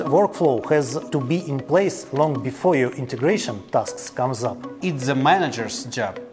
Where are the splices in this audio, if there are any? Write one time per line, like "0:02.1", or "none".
0:01.0
0:04.7

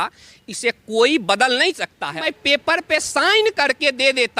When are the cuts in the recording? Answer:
0:02.2

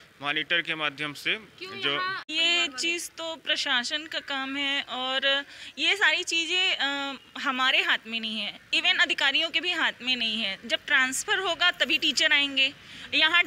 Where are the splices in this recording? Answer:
0:02.2

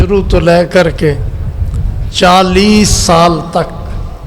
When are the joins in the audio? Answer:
none

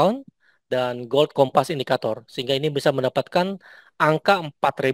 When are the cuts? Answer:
none

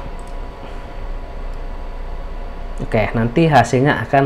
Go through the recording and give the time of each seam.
none

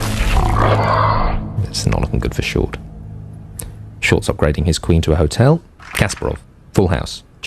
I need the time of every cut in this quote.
0:05.8

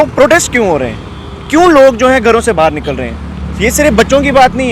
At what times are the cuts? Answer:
none

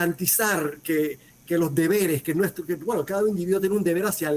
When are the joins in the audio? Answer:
0:01.3

